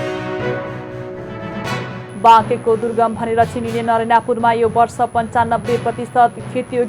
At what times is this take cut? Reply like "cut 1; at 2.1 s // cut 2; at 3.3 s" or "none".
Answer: none